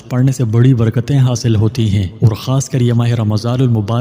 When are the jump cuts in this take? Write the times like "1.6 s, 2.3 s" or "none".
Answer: 2.1 s